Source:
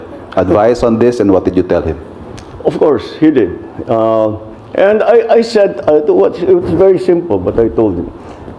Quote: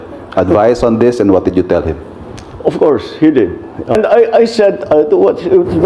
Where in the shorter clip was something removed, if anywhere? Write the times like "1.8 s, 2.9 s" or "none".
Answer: 3.9 s